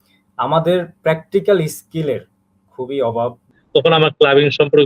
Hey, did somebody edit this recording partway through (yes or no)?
yes